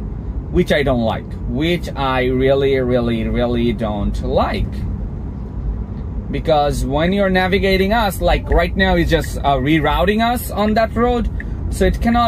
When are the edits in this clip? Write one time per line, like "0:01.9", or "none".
none

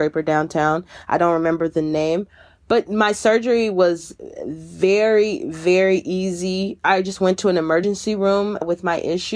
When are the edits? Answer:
0:06.8

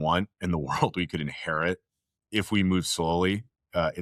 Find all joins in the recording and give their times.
none

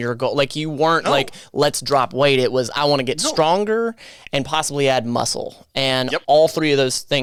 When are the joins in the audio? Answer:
none

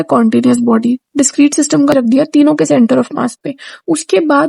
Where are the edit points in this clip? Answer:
0:01.9

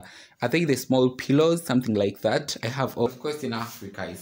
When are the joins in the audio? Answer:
0:03.1

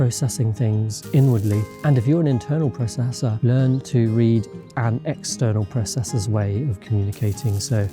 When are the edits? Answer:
0:01.7

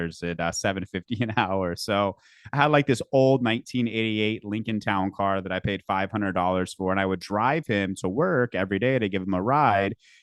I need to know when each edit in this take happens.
none

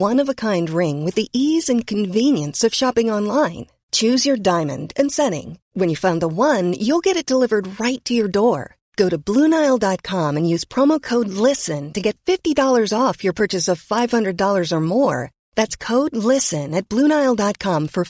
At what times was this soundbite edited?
none

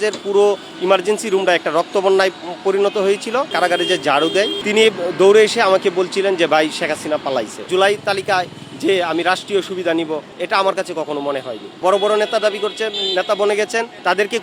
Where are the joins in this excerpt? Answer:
0:03.5
0:04.6
0:07.6
0:11.7

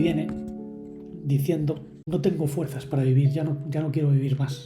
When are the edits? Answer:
0:02.0

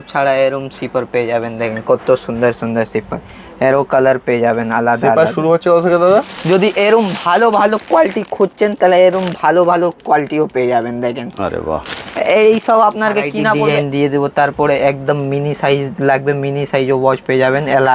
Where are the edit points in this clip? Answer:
0:06.3
0:13.7

